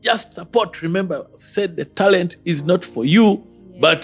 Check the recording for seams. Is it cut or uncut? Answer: uncut